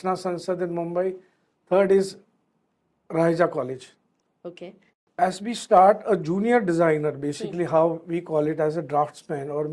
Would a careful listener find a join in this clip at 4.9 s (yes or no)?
yes